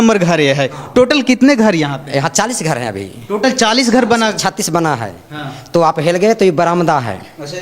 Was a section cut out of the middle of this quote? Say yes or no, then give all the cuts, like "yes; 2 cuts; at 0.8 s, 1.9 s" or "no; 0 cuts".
no; 0 cuts